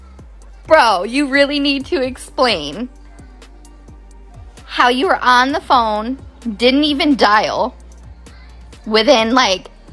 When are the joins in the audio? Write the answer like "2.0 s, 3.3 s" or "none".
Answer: none